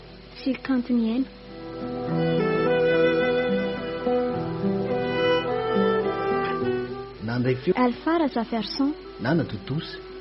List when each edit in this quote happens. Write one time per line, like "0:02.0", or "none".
0:07.7
0:09.1